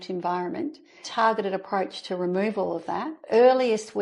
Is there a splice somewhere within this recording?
yes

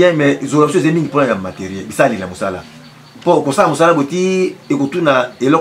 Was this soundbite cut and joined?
no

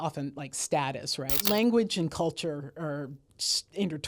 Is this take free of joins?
no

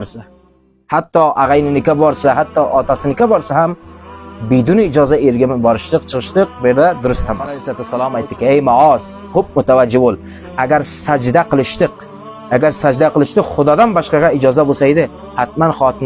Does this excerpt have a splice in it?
yes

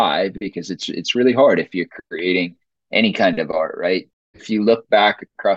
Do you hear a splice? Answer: yes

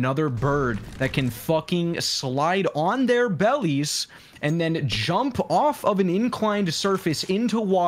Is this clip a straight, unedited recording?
yes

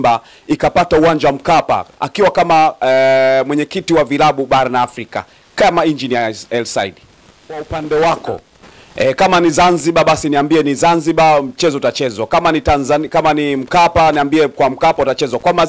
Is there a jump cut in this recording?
yes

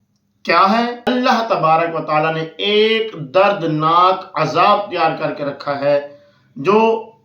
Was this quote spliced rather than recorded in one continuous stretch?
yes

